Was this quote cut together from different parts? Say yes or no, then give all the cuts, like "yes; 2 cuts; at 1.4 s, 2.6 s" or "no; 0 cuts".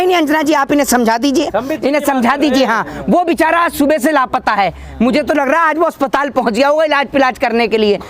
no; 0 cuts